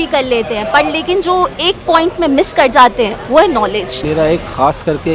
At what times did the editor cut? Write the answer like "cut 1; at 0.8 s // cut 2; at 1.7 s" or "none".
cut 1; at 4.0 s